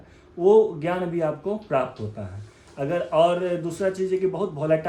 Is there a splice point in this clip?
no; 0 cuts

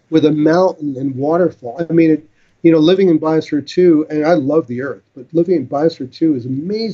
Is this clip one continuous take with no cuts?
yes; 0 cuts

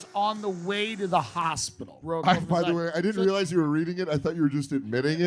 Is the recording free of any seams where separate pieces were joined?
no; 1 cut; at 2.0 s

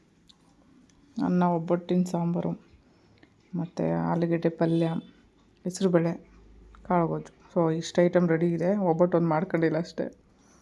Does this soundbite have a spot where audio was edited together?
no; 0 cuts

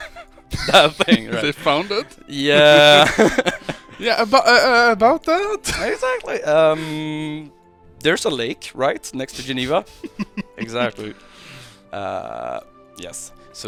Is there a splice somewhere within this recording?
no; 0 cuts

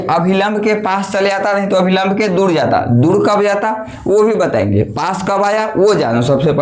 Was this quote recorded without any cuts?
yes; 0 cuts

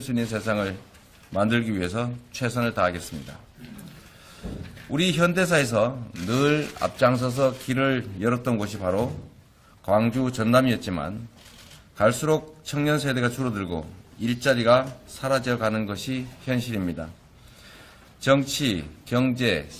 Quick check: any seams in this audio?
yes; 1 cut; at 1.8 s

